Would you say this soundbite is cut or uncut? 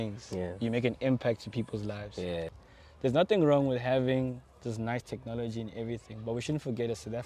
cut